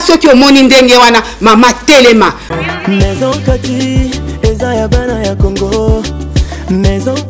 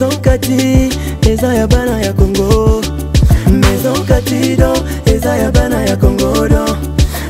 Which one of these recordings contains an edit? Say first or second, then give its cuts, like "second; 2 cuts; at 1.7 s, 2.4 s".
first; 1 cut; at 2.4 s